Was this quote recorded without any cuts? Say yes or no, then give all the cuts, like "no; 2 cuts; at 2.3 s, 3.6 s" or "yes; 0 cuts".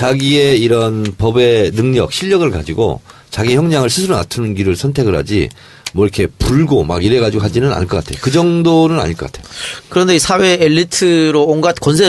no; 1 cut; at 10.8 s